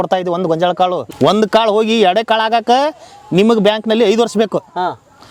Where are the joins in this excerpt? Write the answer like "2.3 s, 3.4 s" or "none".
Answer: 1.1 s